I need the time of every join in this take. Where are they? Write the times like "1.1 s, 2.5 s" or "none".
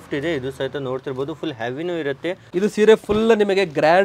2.4 s